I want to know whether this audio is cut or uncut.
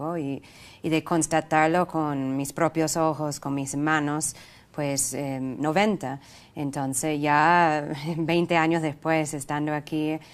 uncut